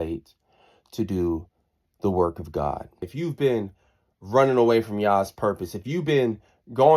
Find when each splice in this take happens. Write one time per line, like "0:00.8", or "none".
0:03.1